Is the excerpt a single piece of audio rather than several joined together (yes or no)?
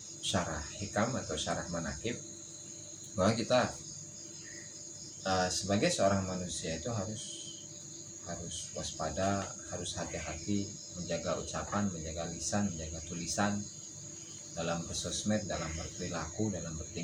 yes